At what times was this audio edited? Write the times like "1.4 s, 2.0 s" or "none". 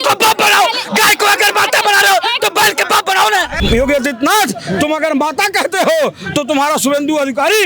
3.6 s